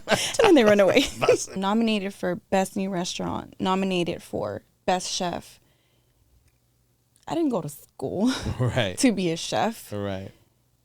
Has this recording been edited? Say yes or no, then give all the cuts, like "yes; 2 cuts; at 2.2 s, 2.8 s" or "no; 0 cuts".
yes; 1 cut; at 1.6 s